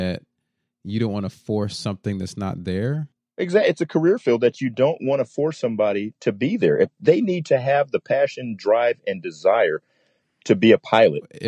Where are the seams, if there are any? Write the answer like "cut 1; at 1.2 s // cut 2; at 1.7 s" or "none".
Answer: cut 1; at 3.2 s

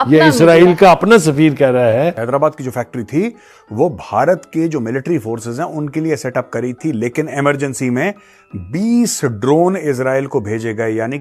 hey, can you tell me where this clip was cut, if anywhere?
cut 1; at 2.2 s

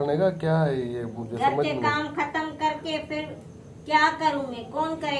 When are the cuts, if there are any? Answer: none

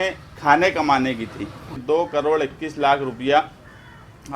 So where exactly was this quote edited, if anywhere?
cut 1; at 1.8 s

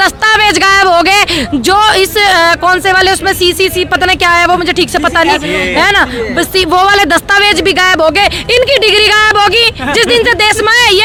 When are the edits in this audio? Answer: none

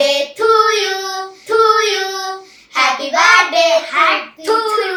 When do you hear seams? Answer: none

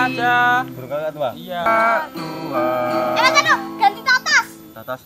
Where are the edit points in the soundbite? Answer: cut 1; at 1.7 s

